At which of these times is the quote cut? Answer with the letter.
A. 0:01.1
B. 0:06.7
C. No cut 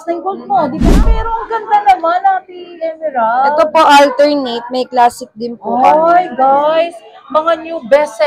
A